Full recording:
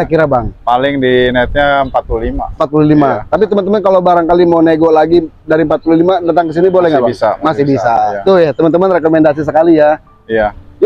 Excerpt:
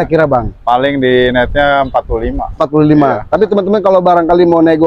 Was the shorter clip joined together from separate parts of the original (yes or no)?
no